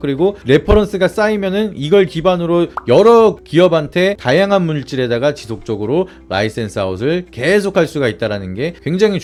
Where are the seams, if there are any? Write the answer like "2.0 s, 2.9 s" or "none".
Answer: none